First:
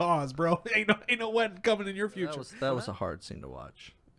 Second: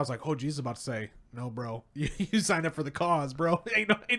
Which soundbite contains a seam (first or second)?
first